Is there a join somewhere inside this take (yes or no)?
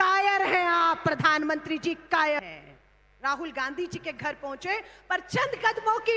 yes